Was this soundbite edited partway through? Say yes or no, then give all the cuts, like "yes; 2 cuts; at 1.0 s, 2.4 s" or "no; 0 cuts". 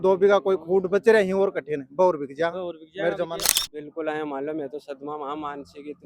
yes; 1 cut; at 3.6 s